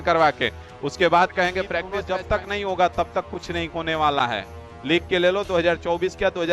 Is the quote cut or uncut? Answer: cut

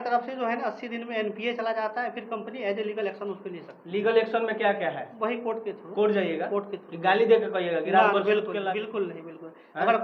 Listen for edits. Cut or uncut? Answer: cut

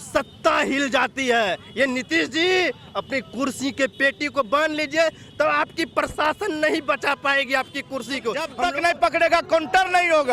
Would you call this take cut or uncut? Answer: cut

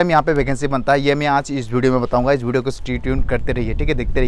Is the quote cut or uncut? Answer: uncut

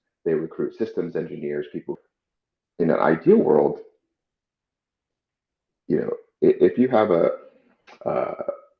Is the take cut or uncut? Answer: cut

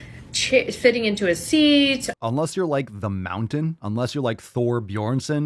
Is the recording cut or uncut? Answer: cut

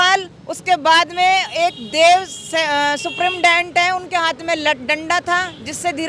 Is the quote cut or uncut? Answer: uncut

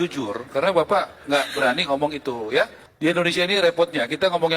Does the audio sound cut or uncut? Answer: cut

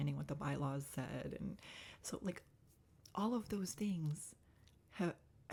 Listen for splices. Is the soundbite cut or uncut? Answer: uncut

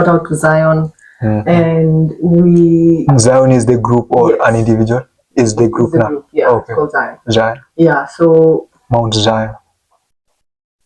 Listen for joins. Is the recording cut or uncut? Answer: uncut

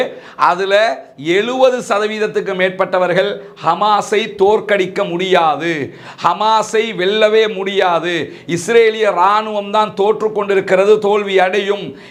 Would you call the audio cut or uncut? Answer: uncut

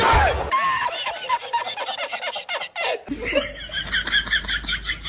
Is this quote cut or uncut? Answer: uncut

